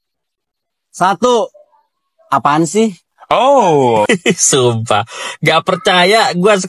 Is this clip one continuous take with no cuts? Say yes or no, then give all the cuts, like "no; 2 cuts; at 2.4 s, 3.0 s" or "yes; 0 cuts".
no; 1 cut; at 4.1 s